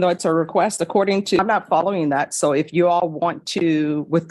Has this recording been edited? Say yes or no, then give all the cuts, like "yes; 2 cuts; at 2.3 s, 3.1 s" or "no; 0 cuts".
yes; 1 cut; at 1.4 s